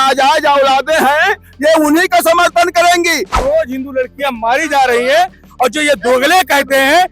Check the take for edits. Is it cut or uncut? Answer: cut